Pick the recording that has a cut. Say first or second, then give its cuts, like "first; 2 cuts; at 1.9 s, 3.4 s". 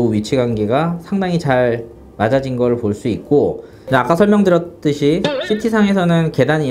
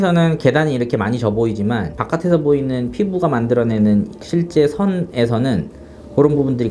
first; 1 cut; at 3.7 s